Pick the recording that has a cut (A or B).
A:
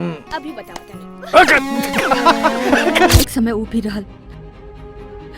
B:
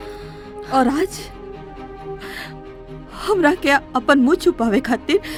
A